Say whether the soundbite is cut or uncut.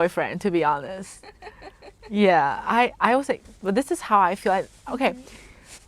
uncut